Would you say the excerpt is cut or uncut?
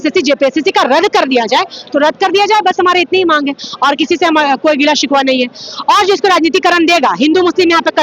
uncut